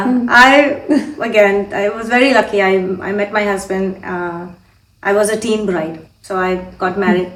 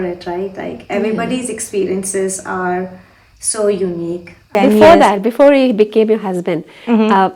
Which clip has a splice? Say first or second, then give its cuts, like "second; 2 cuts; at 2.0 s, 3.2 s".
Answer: second; 1 cut; at 4.5 s